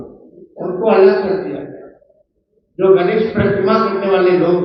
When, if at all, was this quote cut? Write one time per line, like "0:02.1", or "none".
none

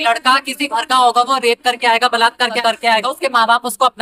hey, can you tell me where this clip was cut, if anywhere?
0:02.5

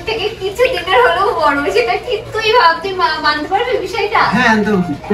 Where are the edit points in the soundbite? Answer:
none

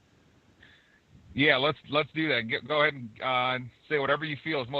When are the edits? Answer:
0:01.9

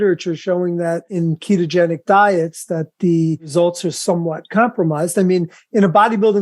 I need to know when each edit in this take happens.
0:01.1
0:03.5

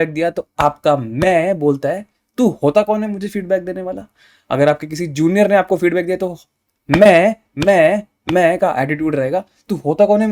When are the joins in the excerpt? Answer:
none

